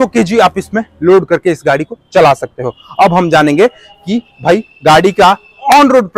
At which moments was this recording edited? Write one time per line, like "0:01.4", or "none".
none